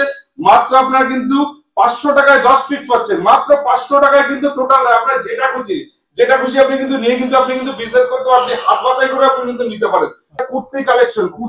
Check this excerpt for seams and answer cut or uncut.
cut